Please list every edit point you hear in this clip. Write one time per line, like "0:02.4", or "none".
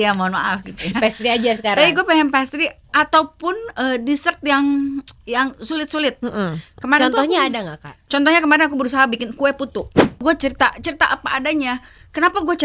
0:10.2